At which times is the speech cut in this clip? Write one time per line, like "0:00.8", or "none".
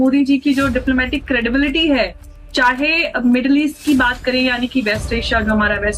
none